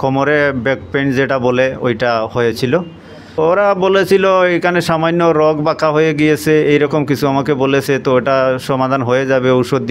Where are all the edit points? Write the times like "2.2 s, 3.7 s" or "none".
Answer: 3.3 s